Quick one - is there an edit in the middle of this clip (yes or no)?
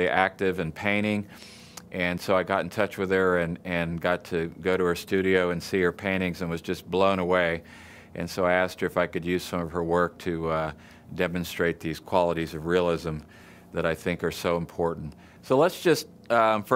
yes